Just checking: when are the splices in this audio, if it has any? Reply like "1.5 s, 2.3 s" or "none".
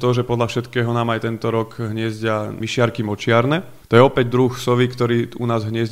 2.6 s, 3.7 s